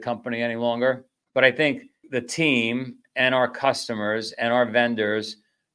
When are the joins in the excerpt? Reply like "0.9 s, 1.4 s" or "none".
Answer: 1.1 s, 2.0 s